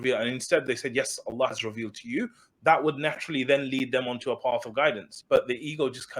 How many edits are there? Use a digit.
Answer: 1